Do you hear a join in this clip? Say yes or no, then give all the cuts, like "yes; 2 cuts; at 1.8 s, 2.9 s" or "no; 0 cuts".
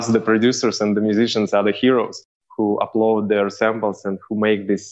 no; 0 cuts